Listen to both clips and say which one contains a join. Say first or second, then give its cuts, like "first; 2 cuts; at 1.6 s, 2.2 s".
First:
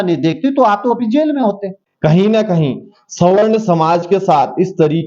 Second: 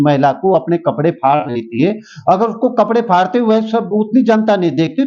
first; 1 cut; at 1.8 s